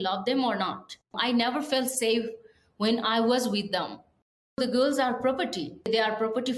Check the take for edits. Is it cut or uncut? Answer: cut